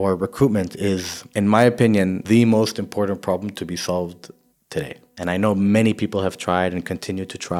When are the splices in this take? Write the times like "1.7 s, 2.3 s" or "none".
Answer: 1.2 s, 2.2 s, 4.7 s